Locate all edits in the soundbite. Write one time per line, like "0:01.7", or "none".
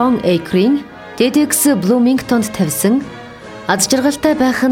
0:01.0